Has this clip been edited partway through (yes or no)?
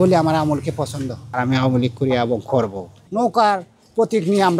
yes